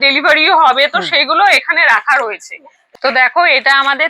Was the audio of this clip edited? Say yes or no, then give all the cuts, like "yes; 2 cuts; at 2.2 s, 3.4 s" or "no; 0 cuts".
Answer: yes; 1 cut; at 2.8 s